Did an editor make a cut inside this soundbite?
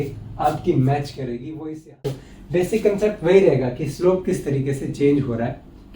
yes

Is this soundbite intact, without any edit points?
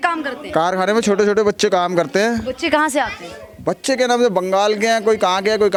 yes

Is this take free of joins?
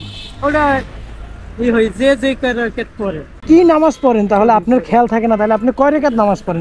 no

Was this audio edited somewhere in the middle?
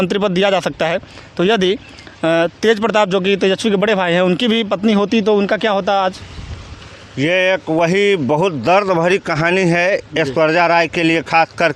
no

